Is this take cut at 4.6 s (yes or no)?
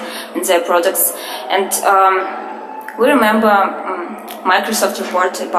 yes